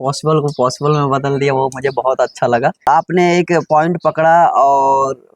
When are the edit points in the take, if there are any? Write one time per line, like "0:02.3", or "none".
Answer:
0:02.9